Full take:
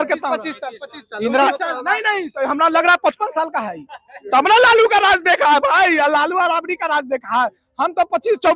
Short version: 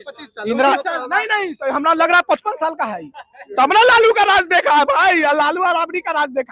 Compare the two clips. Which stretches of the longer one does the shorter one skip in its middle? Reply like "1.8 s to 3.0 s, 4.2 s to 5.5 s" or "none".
none